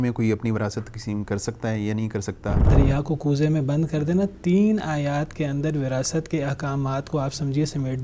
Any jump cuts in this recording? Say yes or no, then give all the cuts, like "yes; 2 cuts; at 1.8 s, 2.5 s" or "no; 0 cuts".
yes; 1 cut; at 2.6 s